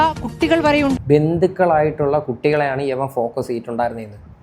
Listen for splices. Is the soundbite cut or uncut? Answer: cut